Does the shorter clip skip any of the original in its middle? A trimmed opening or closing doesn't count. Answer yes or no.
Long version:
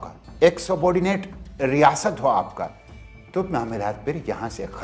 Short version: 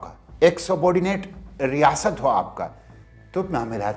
no